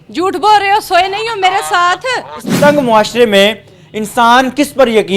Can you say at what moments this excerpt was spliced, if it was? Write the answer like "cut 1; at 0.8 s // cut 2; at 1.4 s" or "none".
cut 1; at 2.4 s